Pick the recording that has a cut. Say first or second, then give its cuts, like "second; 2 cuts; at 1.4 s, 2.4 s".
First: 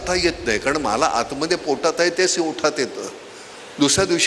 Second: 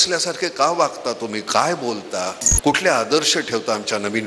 second; 1 cut; at 2.4 s